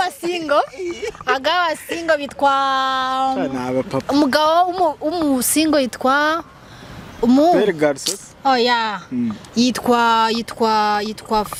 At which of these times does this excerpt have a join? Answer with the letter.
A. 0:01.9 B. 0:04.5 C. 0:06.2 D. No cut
D